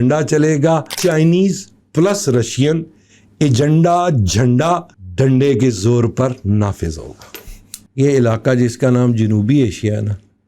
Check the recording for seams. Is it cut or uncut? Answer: cut